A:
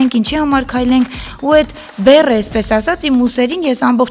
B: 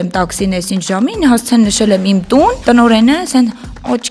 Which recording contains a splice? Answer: B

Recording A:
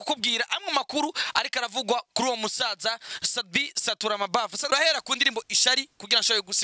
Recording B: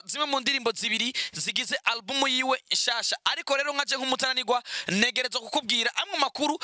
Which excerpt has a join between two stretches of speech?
A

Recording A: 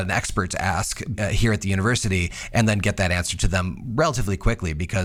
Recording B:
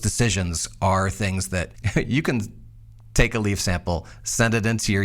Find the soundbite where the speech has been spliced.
B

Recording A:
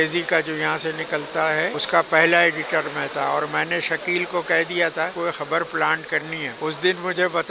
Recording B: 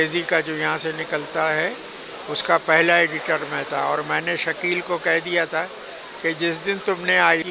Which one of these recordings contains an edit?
A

